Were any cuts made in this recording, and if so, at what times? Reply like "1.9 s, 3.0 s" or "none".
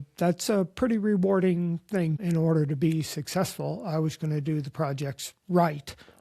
2.2 s